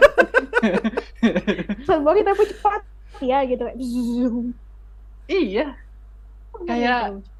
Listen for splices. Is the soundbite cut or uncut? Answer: uncut